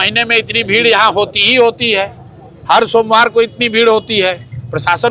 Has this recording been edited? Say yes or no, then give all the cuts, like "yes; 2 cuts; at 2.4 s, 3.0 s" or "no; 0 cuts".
no; 0 cuts